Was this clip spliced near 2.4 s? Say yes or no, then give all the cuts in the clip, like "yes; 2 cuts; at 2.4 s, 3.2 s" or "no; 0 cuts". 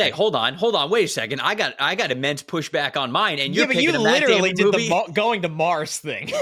no; 0 cuts